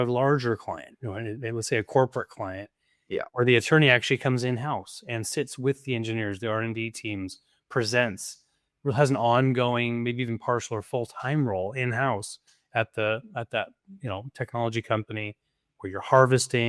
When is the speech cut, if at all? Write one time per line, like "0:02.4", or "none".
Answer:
none